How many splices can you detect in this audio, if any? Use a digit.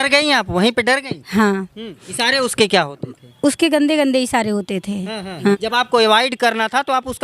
2